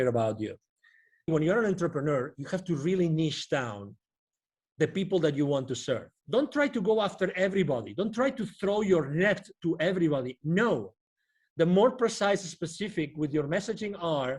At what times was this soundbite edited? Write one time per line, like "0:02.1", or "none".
0:01.3
0:06.1